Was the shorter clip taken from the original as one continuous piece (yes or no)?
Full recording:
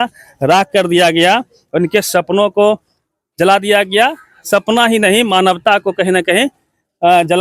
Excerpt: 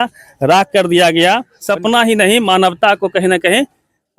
no